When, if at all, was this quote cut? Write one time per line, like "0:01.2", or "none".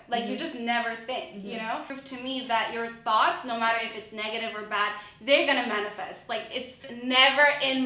0:01.9
0:06.9

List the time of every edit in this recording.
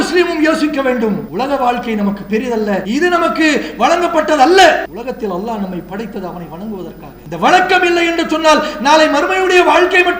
0:01.3
0:02.8
0:04.9
0:07.1

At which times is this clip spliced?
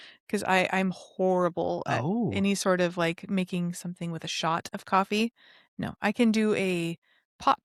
none

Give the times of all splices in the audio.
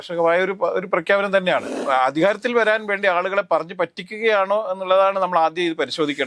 0:01.8

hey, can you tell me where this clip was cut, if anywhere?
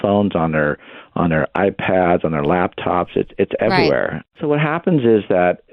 0:04.3

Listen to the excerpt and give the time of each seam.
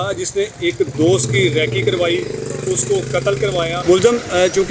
0:03.8

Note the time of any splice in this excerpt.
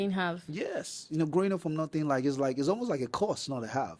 none

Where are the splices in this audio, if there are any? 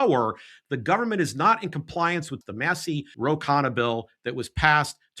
0:02.5

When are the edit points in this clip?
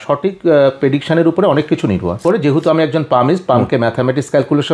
0:02.2

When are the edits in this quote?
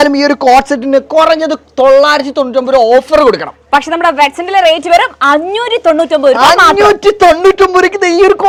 none

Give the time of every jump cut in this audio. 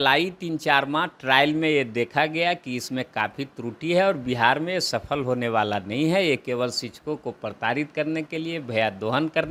none

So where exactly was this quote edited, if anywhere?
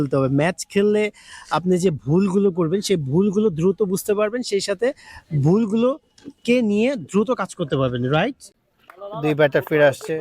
0:08.5

